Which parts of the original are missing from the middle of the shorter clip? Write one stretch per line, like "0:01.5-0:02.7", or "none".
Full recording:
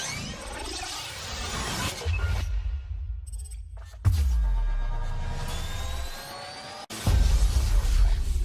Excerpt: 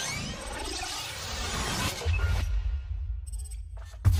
none